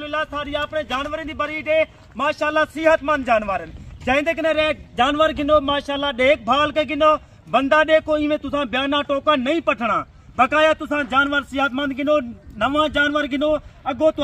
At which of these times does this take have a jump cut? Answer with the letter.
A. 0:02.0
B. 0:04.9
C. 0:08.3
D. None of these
D